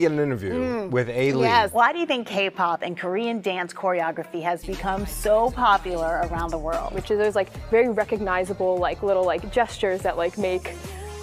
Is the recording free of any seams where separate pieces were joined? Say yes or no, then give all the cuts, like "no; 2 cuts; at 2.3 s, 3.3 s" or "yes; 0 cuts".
no; 2 cuts; at 1.7 s, 6.9 s